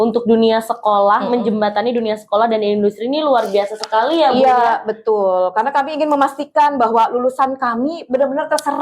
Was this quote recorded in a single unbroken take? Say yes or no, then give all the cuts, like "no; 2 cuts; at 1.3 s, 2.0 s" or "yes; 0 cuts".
yes; 0 cuts